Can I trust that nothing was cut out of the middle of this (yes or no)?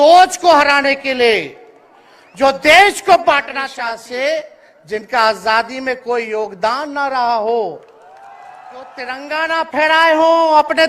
no